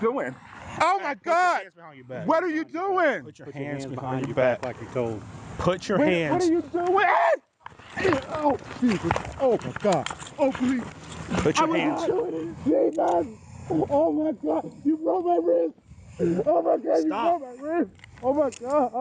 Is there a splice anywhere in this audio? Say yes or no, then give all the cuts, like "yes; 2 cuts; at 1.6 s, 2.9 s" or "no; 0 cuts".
yes; 1 cut; at 4.3 s